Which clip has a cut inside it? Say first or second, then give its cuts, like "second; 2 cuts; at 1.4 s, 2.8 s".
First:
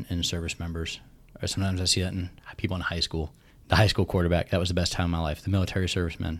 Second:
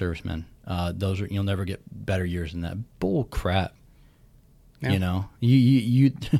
first; 1 cut; at 3.4 s